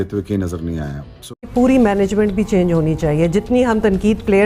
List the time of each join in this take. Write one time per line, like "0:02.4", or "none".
0:01.5